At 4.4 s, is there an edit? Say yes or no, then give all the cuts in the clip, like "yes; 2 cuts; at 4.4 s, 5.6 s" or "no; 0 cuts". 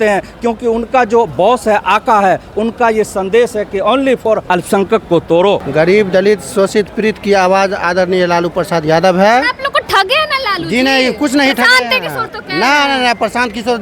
yes; 2 cuts; at 4.4 s, 5.7 s